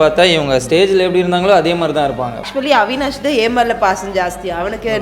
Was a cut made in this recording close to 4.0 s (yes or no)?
no